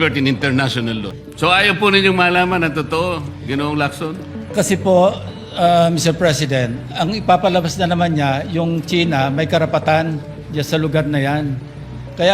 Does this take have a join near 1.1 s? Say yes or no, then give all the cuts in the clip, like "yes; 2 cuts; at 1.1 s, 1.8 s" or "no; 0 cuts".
yes; 1 cut; at 1.1 s